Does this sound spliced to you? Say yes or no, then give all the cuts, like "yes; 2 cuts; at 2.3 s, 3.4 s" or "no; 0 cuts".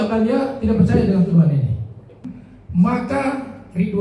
yes; 1 cut; at 2.3 s